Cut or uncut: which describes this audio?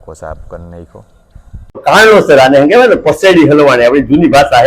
cut